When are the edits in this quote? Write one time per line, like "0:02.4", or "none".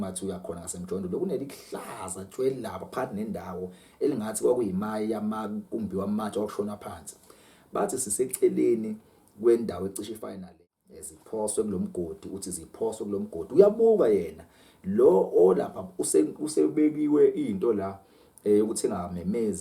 0:10.3

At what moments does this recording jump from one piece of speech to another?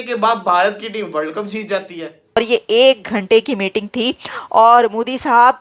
0:02.4

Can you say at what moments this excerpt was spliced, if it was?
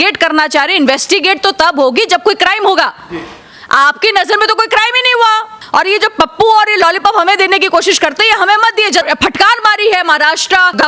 0:05.5
0:09.1

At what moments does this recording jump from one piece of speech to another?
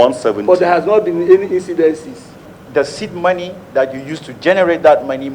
0:02.4

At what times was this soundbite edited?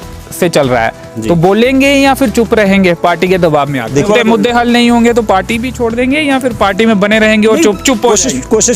0:04.0

